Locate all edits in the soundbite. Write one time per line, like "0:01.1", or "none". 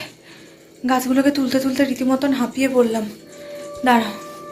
none